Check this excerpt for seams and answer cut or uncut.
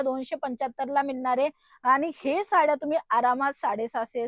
uncut